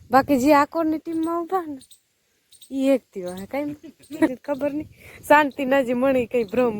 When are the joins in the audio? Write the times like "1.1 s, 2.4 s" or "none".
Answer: 4.4 s